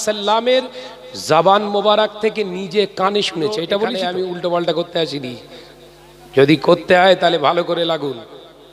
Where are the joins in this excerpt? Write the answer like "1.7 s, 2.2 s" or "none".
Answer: 3.9 s